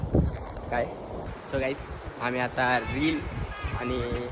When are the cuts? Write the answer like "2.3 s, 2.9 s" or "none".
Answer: 1.2 s

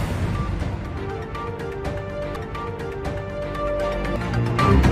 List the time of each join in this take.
none

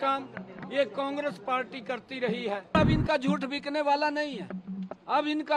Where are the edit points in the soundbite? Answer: 2.7 s

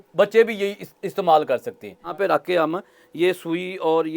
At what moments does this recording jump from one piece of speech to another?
2.1 s

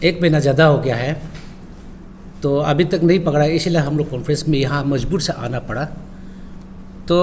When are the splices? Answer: none

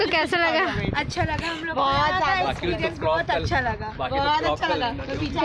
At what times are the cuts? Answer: none

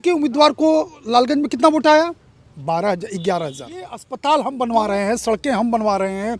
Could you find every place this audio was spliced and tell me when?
4.1 s

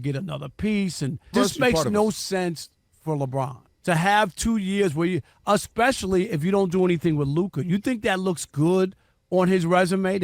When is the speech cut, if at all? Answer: 1.3 s, 3.6 s

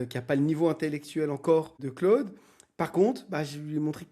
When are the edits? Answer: 1.8 s

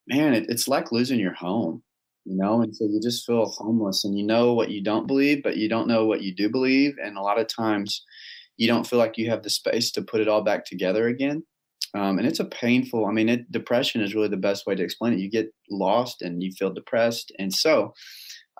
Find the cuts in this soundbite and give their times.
none

